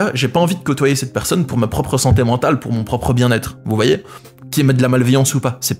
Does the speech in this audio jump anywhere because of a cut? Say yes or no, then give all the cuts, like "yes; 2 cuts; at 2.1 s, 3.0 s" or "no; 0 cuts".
no; 0 cuts